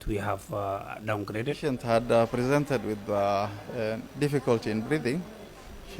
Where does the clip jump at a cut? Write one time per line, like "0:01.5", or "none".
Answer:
0:01.6